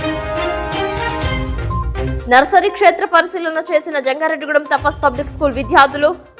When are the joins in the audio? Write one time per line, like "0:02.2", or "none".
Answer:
0:02.1